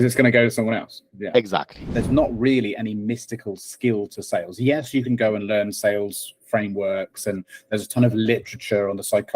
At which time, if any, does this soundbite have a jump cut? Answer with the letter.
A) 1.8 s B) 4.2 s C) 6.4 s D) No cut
A